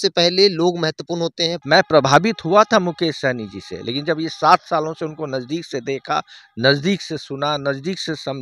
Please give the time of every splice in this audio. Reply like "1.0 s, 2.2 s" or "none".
1.6 s